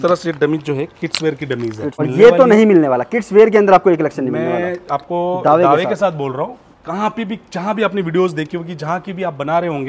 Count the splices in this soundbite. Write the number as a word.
one